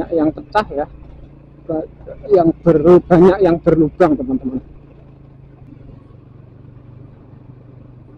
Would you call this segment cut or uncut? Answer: cut